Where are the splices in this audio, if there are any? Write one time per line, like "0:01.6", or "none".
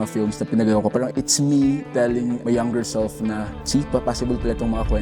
0:01.1
0:02.4
0:03.5